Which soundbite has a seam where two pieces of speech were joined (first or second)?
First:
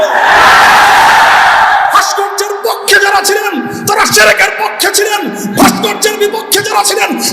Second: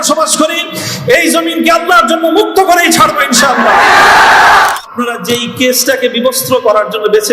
second